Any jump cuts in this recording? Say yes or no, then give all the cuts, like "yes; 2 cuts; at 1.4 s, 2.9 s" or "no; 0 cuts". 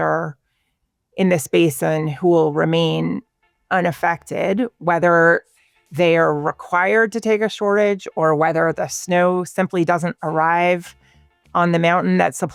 no; 0 cuts